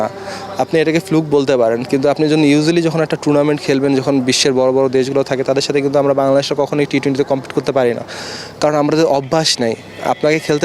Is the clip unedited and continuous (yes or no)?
yes